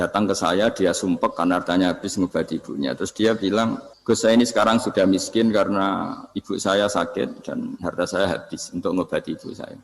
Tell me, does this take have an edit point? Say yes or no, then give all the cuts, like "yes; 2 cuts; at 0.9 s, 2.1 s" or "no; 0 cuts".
yes; 1 cut; at 3.9 s